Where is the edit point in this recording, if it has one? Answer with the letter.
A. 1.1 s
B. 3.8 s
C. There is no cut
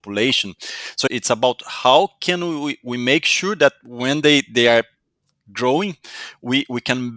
A